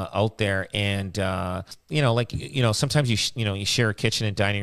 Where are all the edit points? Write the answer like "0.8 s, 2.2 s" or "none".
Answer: 1.7 s